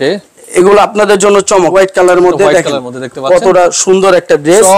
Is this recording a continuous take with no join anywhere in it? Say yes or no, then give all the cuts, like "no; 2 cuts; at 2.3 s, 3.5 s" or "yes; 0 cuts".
no; 1 cut; at 1.7 s